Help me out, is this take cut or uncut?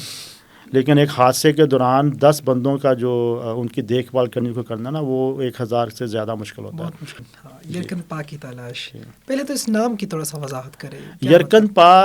cut